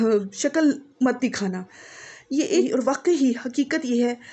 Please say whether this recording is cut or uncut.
cut